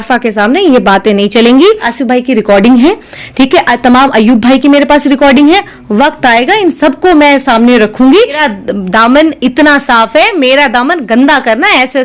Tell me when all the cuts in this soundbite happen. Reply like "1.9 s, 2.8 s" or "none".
1.8 s, 8.4 s